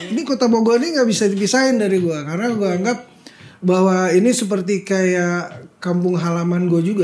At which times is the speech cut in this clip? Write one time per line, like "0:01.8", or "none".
none

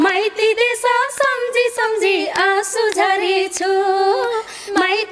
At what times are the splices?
none

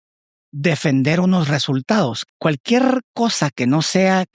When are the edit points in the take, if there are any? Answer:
0:02.2

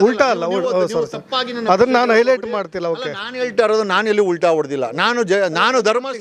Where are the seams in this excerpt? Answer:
none

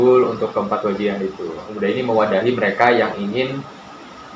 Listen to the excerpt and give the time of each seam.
0:01.7

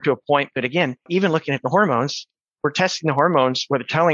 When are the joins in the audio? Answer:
0:01.0

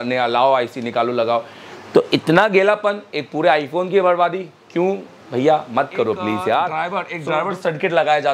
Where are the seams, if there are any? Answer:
0:06.7

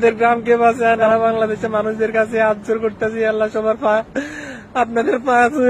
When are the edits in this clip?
0:01.0

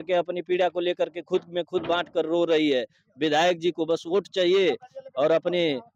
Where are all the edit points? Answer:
none

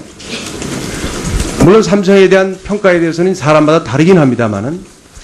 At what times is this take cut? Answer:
none

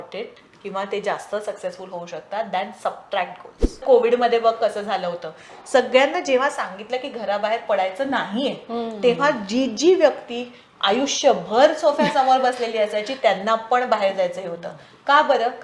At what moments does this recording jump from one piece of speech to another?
0:03.8

